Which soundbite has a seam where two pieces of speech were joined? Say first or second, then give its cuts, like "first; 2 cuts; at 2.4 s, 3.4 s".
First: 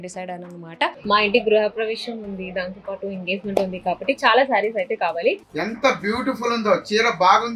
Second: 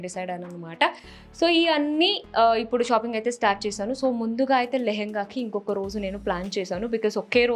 first; 2 cuts; at 1.0 s, 5.5 s